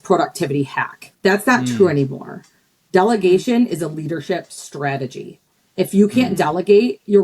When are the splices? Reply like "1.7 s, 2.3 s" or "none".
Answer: 1.0 s